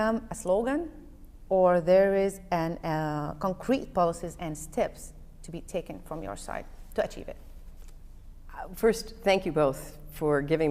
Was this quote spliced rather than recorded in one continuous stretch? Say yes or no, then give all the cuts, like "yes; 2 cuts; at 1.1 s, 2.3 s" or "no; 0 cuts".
yes; 1 cut; at 3.8 s